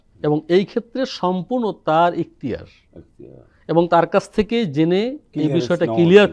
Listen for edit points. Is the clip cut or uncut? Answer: uncut